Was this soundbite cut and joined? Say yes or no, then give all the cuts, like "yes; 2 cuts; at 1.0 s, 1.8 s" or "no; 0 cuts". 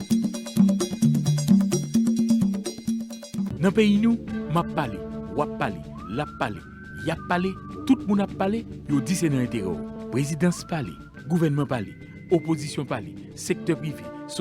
yes; 1 cut; at 3.5 s